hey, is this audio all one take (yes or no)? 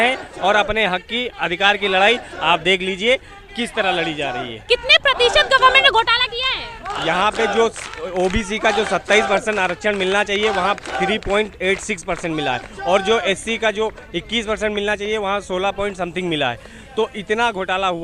yes